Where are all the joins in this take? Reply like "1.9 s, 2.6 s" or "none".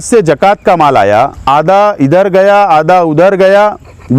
1.4 s